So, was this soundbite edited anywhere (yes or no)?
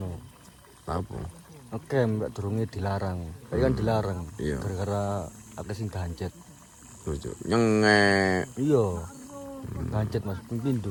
no